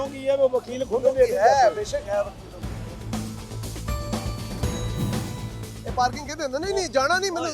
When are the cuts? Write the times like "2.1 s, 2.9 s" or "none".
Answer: 5.2 s